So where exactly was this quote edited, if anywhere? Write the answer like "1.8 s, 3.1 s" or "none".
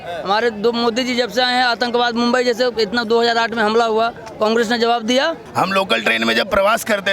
5.4 s